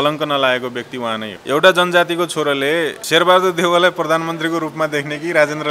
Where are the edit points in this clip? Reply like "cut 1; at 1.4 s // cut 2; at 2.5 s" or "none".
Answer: cut 1; at 1.3 s // cut 2; at 3.0 s